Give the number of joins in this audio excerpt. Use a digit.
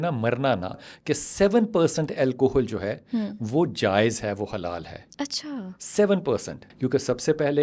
2